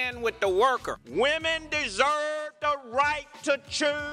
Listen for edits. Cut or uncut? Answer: cut